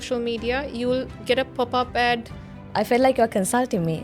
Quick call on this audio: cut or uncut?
cut